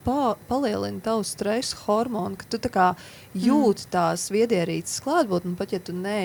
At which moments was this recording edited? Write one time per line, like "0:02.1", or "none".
none

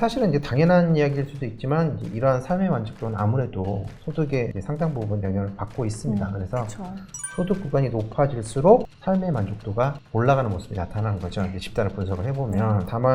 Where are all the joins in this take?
none

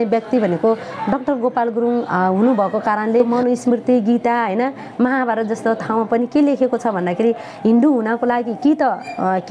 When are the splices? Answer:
0:03.3

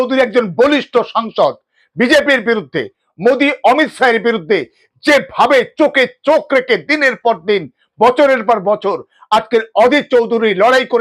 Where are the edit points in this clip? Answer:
none

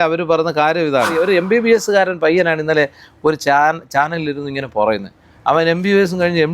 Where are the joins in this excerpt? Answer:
0:01.2

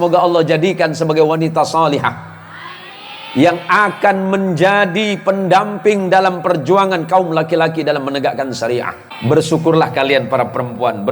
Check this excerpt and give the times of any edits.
0:09.0

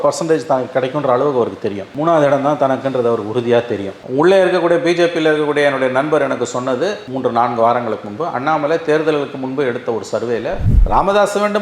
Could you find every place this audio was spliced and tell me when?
0:10.7

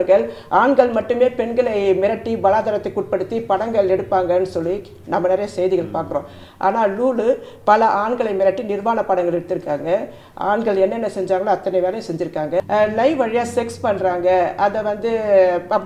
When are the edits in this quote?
0:12.6

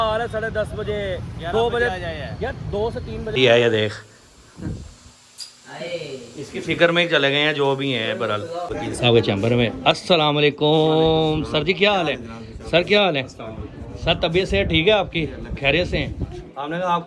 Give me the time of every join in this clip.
0:03.4
0:08.7

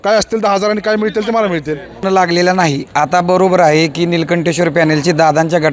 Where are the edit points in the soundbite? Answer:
0:02.0

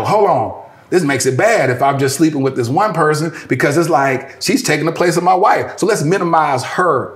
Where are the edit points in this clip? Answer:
none

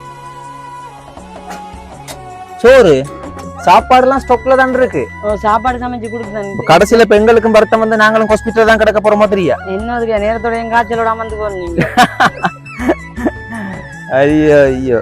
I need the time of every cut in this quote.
0:06.5

